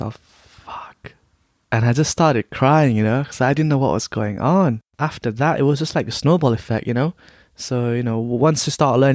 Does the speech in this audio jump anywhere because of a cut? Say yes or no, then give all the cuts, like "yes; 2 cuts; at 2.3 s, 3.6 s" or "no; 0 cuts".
yes; 1 cut; at 4.9 s